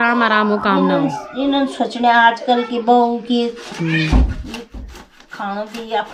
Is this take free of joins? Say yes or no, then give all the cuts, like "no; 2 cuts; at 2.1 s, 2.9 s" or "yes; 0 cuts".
yes; 0 cuts